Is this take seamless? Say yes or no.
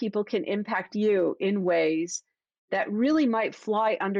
yes